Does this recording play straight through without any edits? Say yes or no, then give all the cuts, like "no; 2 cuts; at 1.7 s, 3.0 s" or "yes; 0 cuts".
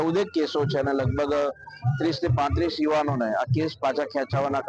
yes; 0 cuts